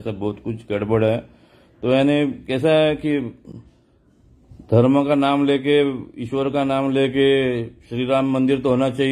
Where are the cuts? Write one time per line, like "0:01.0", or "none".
none